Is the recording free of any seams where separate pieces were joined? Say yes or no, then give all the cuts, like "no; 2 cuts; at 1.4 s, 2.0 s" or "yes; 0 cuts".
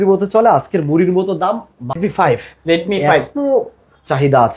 no; 1 cut; at 2.0 s